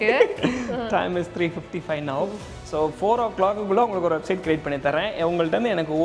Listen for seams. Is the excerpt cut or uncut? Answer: uncut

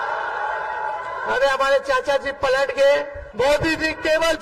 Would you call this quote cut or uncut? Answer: cut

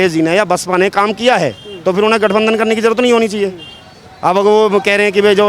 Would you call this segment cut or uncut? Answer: uncut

